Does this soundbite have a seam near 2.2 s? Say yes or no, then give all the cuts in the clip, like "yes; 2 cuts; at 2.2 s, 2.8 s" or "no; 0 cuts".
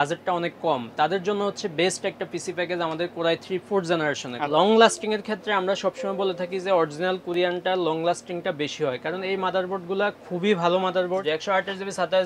no; 2 cuts; at 4.3 s, 11.2 s